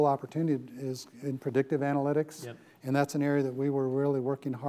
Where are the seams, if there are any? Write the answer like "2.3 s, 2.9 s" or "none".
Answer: none